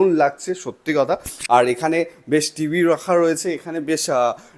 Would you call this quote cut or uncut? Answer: uncut